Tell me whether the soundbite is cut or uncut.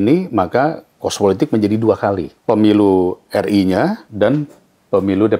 cut